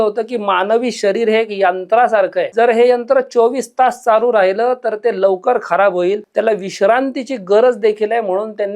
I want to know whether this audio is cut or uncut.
cut